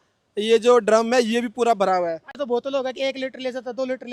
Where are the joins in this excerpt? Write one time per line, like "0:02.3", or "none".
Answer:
0:02.3